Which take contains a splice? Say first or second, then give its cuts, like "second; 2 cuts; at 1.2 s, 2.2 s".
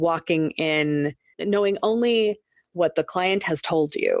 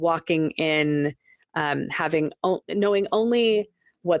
first; 1 cut; at 1.4 s